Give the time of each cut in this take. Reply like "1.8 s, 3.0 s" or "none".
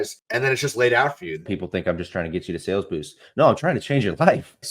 1.5 s